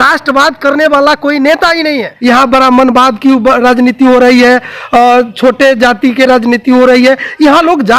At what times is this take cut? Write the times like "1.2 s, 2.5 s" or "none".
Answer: 2.1 s